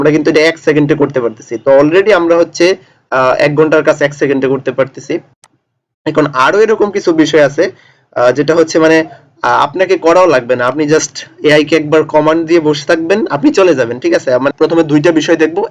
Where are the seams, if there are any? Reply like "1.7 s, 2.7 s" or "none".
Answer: 14.5 s